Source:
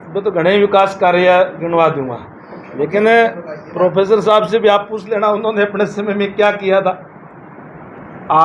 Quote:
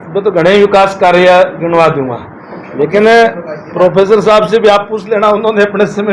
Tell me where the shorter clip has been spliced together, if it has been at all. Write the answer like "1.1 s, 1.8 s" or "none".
none